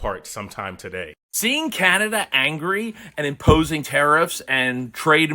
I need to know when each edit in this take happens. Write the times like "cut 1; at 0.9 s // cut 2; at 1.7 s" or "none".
cut 1; at 1.3 s